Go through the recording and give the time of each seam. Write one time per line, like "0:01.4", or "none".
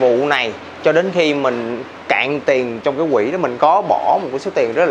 none